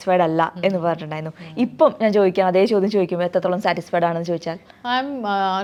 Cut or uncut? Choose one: uncut